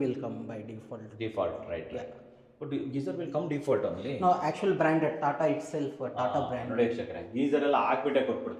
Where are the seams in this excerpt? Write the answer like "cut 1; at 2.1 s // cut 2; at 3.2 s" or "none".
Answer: none